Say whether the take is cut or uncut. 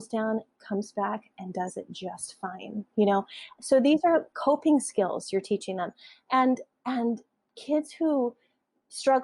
uncut